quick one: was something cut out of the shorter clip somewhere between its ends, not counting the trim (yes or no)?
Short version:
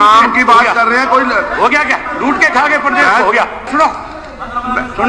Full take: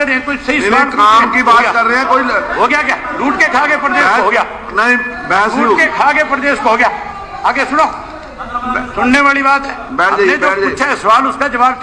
yes